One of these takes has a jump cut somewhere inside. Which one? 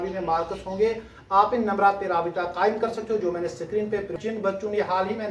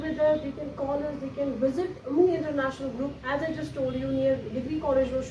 first; 1 cut; at 4.1 s

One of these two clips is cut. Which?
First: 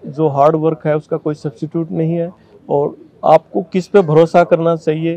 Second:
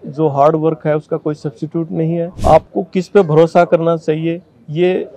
second; 1 cut; at 2.3 s

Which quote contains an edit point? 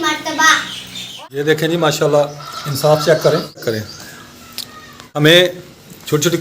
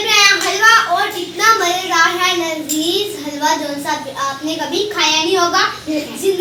first; 3 cuts; at 1.1 s, 3.6 s, 5.2 s

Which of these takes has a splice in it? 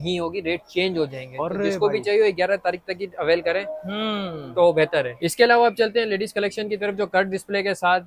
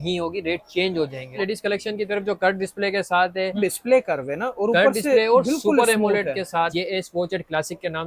second; 3 cuts; at 1.4 s, 3.6 s, 6.7 s

